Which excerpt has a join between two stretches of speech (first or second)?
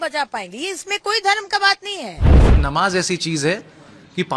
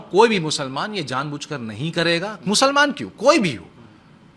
first